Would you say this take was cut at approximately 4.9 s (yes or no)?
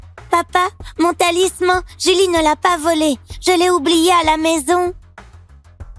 yes